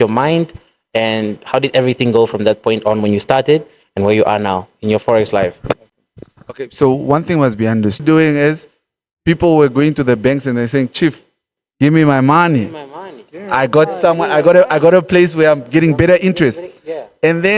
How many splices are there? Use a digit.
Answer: 1